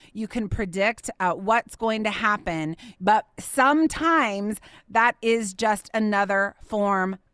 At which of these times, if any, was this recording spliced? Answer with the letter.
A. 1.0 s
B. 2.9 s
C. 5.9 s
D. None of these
B